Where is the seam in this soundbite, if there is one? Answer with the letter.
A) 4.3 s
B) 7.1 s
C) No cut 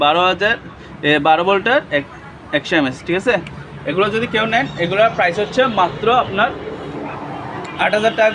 C